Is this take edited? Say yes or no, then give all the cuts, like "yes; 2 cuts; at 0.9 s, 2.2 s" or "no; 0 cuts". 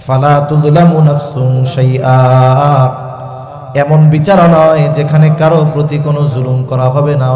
no; 0 cuts